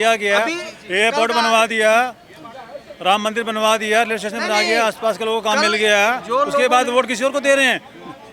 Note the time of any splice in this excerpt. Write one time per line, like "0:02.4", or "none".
none